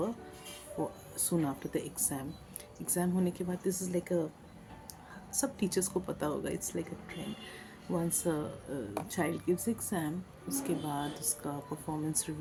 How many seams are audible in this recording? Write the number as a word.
zero